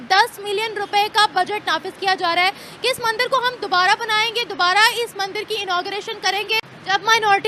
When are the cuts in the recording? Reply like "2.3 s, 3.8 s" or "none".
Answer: none